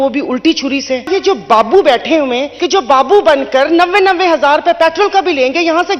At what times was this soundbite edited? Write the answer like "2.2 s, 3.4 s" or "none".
1.1 s, 2.5 s